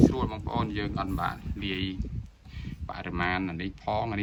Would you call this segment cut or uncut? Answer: uncut